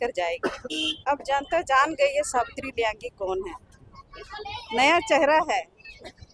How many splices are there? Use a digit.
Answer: 1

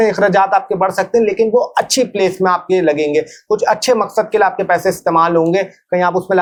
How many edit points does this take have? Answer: 0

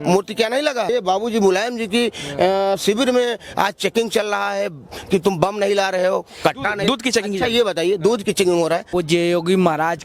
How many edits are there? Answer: 2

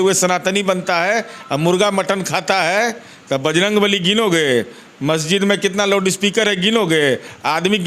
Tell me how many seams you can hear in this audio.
0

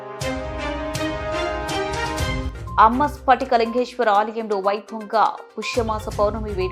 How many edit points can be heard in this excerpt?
1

